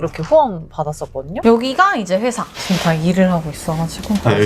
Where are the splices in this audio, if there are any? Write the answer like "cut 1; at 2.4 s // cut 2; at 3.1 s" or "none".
cut 1; at 1.3 s